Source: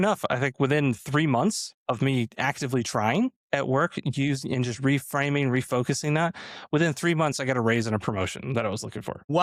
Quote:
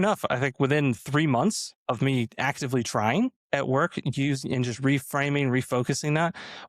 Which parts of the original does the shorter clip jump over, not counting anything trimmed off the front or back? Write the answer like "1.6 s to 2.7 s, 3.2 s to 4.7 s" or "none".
none